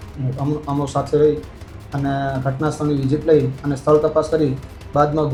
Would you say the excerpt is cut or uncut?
uncut